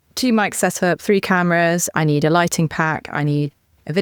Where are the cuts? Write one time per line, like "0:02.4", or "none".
none